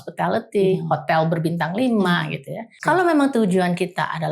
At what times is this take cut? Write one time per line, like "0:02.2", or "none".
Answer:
0:02.7